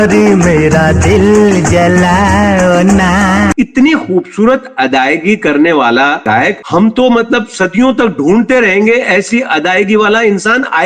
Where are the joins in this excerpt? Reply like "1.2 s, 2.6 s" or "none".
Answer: 3.5 s